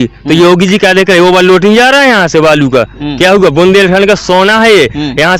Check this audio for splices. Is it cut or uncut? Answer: uncut